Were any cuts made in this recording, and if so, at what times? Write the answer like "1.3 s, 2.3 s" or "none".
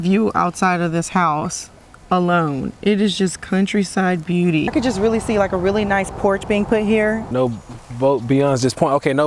4.7 s, 7.3 s